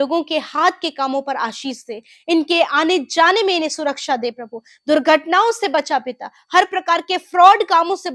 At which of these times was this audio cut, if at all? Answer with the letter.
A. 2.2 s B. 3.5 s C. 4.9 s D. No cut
D